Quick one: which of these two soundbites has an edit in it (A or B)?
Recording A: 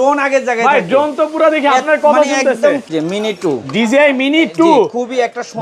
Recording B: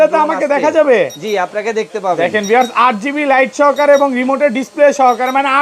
A